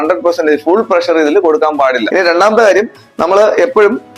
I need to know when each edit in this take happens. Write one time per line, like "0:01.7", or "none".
0:02.1

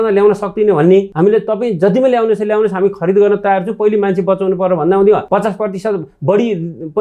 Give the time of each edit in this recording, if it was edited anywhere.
0:01.1
0:05.2

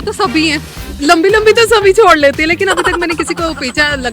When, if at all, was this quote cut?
none

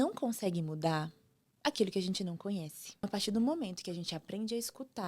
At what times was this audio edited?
0:03.1

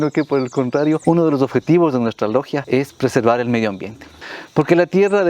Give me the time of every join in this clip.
0:01.0
0:02.6
0:04.2

